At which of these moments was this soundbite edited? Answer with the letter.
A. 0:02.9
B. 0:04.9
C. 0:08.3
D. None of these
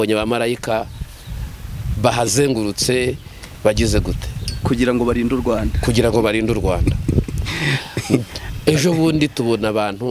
D